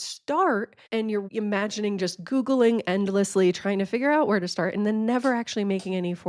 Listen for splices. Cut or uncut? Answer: cut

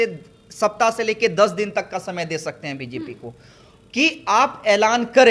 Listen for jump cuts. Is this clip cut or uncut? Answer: uncut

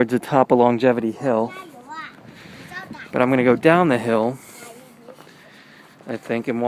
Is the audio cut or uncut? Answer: cut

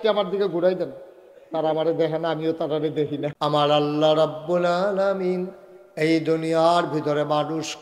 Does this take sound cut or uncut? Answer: cut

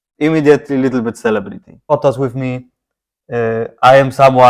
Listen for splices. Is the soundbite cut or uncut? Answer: cut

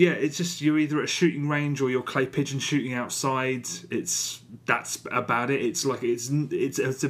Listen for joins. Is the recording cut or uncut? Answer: uncut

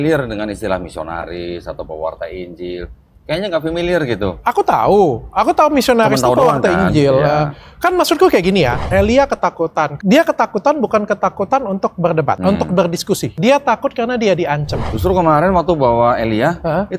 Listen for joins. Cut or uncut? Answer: cut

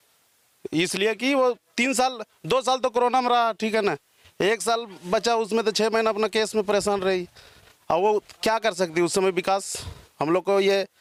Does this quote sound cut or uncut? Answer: uncut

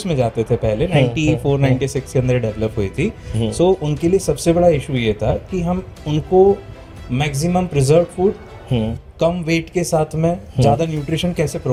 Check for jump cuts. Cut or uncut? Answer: uncut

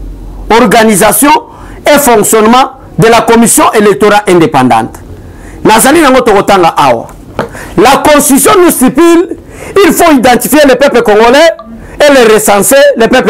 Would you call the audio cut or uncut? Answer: uncut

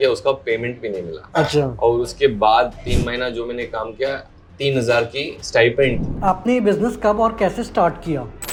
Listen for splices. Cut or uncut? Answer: uncut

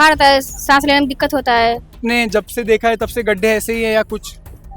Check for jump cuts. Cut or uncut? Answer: uncut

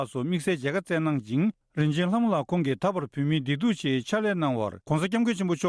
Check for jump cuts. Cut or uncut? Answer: cut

